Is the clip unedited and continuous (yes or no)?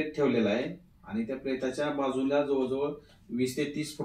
yes